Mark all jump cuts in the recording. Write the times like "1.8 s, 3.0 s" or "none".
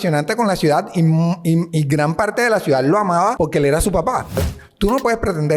3.3 s, 4.6 s